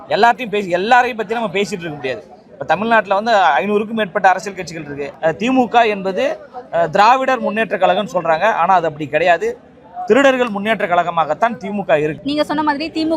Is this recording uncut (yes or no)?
no